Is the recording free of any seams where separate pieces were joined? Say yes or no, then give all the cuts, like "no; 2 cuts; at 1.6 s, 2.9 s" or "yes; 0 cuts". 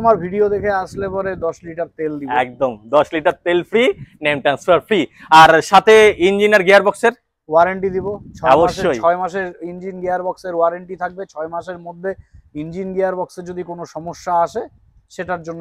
yes; 0 cuts